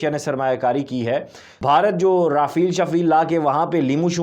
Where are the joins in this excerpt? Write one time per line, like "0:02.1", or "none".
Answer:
0:01.4